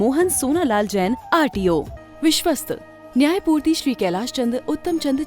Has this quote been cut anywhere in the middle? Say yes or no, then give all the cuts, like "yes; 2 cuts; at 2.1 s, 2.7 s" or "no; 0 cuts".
yes; 1 cut; at 2.0 s